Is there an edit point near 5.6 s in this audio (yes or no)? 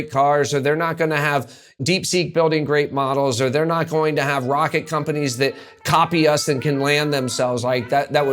no